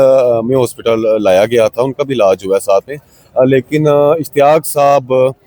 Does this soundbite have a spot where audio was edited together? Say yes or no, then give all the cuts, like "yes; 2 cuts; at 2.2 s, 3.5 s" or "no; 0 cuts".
no; 0 cuts